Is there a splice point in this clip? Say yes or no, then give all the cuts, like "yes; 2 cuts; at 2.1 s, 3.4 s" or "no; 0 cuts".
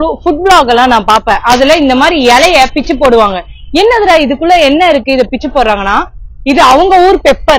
no; 0 cuts